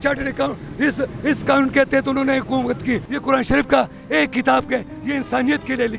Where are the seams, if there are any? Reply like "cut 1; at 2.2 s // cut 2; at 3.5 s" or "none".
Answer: cut 1; at 3.1 s